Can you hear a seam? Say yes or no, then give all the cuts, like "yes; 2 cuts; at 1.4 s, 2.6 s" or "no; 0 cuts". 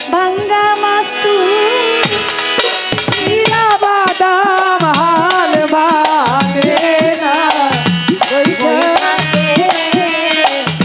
no; 0 cuts